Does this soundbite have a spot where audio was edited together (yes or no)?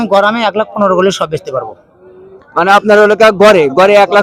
no